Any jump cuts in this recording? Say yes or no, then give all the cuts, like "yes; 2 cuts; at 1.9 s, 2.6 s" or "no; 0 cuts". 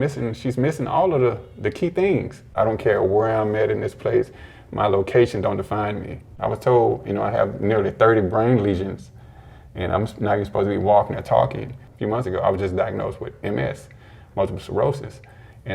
yes; 3 cuts; at 2.5 s, 6.3 s, 11.9 s